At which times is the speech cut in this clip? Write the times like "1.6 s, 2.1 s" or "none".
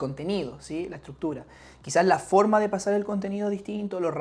none